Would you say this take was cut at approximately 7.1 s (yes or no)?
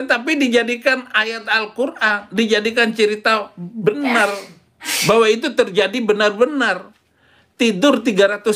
no